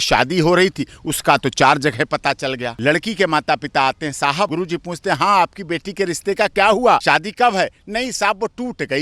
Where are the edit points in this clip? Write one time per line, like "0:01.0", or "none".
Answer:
0:02.7
0:04.5
0:07.0